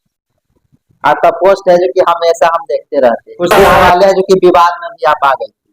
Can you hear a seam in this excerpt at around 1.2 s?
no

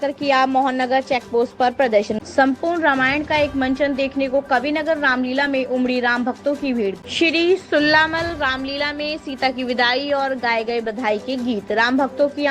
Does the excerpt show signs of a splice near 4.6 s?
no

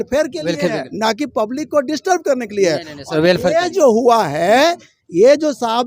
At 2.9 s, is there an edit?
no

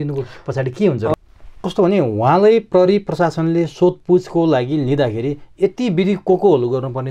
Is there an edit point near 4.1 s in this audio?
no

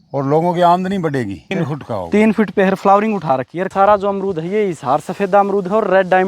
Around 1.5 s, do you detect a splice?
yes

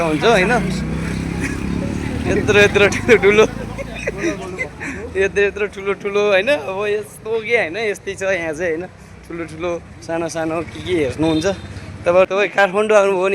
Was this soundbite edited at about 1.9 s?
no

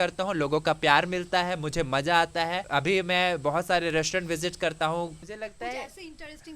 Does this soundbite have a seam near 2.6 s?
yes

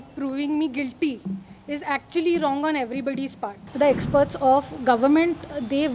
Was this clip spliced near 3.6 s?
yes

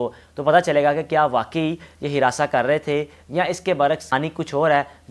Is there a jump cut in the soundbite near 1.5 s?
no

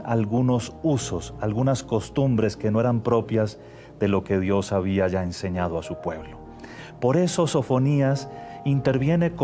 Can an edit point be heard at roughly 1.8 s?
yes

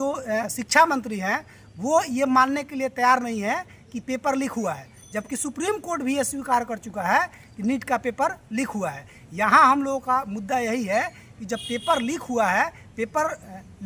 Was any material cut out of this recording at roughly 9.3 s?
no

